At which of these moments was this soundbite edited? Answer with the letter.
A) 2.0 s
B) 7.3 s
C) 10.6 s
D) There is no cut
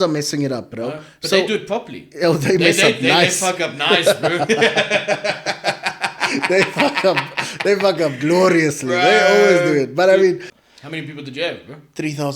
C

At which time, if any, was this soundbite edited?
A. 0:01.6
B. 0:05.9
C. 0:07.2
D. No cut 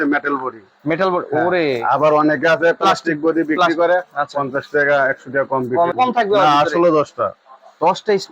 B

